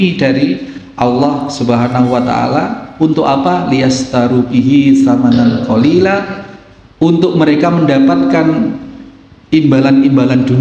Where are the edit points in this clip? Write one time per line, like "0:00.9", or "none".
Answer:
none